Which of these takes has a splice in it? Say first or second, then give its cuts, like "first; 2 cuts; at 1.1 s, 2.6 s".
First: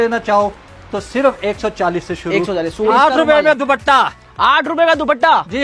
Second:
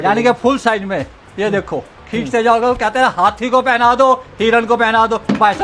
first; 1 cut; at 2.9 s